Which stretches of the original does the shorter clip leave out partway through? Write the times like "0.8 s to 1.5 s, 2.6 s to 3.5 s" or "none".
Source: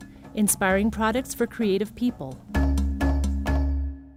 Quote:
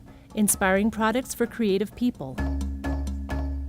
2.3 s to 2.4 s